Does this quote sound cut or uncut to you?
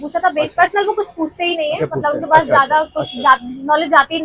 uncut